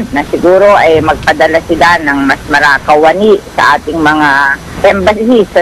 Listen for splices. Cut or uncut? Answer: cut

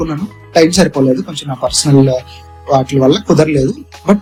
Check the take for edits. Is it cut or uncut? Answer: uncut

